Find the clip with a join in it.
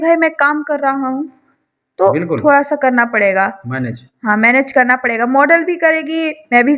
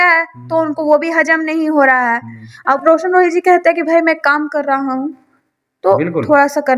second; 1 cut; at 2.8 s

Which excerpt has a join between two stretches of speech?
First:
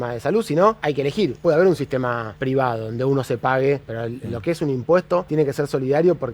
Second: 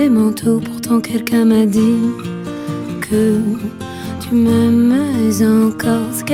first; 4 cuts; at 1.3 s, 2.3 s, 3.9 s, 5.3 s

